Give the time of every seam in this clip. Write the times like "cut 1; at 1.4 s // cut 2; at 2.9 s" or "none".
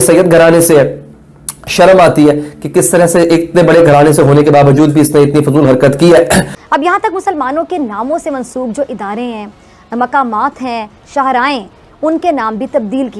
cut 1; at 6.5 s